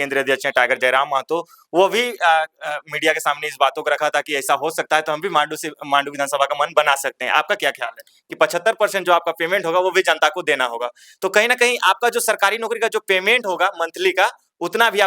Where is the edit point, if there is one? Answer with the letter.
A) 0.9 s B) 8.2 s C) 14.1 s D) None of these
B